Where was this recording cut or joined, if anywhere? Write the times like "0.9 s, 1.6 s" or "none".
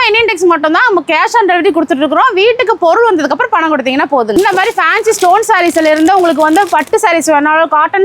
4.4 s